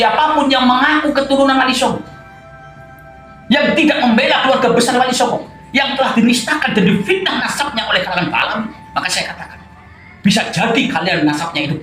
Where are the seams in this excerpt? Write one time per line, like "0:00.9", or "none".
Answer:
none